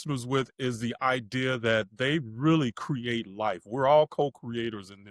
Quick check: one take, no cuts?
yes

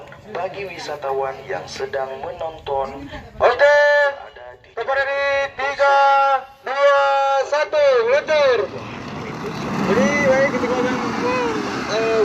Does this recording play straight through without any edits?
yes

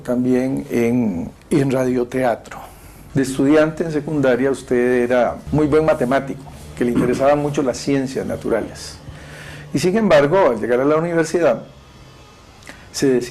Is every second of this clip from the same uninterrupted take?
yes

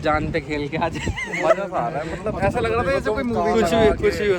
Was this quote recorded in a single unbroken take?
yes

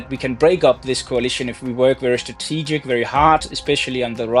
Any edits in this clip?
no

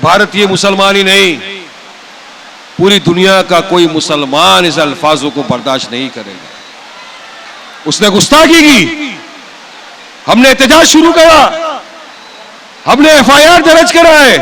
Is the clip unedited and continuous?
no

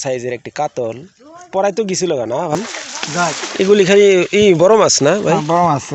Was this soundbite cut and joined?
yes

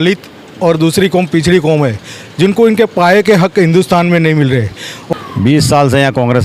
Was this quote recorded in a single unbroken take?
no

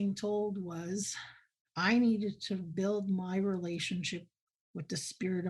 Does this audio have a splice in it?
yes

